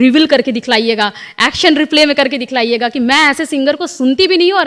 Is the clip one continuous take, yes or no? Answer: yes